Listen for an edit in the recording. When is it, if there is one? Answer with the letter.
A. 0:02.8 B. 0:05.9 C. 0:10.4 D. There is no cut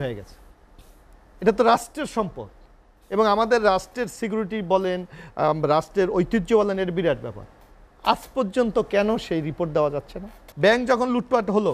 C